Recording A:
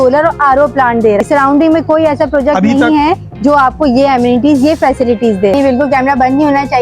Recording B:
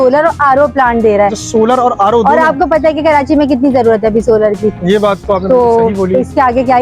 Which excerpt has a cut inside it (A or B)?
A